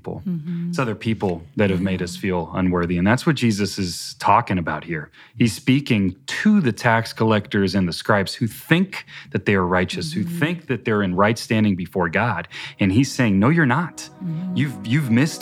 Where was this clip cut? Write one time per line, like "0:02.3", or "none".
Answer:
none